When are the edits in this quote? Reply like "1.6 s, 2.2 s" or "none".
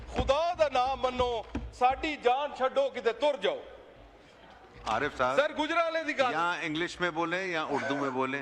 none